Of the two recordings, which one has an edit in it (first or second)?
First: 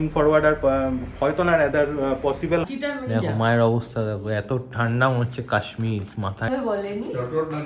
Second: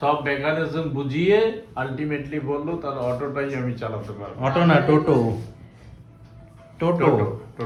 first